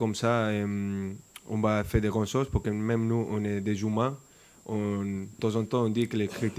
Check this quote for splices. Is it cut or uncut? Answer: uncut